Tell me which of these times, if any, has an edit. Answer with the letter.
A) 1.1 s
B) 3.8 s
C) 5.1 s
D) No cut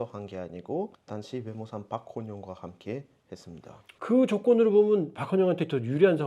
B